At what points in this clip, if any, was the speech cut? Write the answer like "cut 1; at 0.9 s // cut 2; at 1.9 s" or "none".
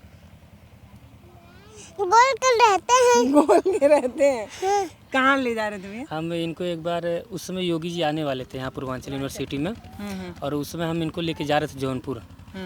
none